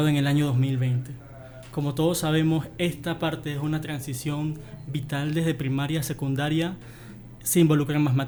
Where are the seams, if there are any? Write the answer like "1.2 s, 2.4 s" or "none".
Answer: none